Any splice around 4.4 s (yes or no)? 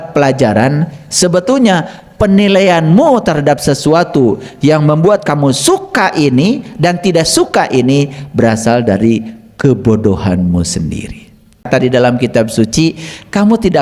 no